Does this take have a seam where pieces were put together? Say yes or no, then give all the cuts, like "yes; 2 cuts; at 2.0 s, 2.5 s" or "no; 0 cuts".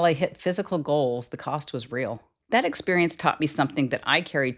yes; 1 cut; at 2.3 s